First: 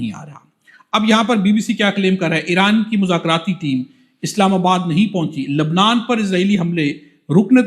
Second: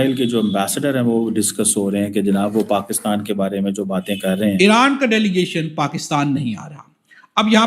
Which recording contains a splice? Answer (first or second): second